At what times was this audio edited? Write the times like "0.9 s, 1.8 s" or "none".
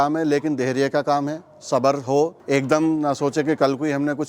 2.4 s

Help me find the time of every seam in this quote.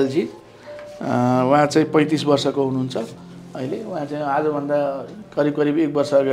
none

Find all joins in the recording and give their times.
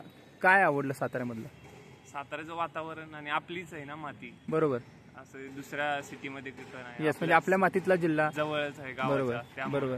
none

